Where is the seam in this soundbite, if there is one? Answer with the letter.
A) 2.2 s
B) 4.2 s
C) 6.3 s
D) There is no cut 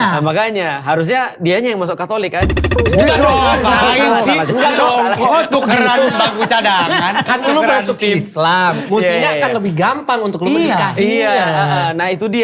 D